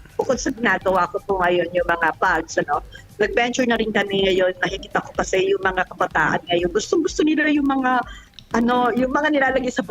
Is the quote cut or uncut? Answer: uncut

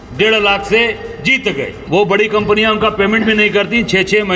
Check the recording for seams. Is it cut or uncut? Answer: cut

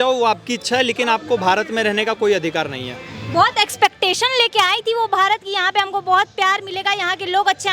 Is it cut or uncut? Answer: uncut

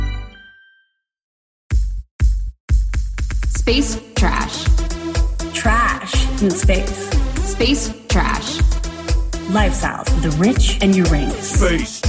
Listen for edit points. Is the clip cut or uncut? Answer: cut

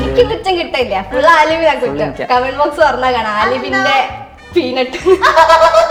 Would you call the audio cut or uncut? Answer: uncut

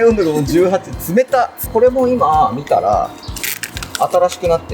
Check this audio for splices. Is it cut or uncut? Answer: cut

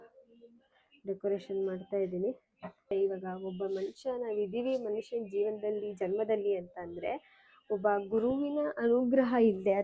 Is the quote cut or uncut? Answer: cut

